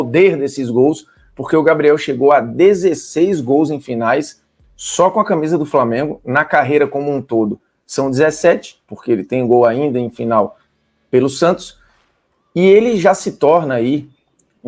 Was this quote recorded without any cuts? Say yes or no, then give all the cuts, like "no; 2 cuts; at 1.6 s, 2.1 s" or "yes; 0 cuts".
yes; 0 cuts